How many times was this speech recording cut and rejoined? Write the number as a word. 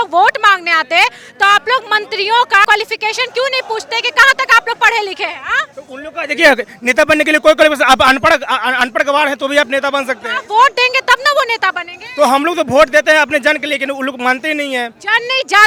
zero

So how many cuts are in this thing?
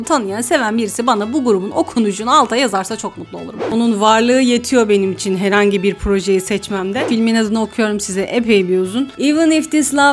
two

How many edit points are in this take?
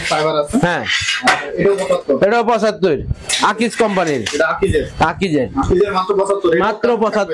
zero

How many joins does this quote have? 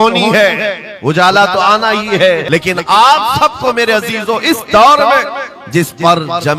one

